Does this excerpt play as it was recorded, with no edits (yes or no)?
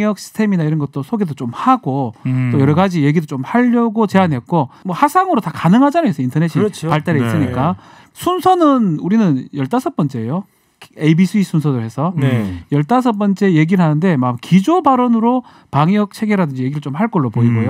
no